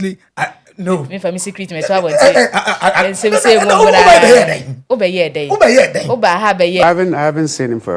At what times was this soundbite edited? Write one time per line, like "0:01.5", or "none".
0:06.8